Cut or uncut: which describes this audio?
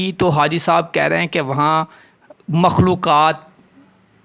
uncut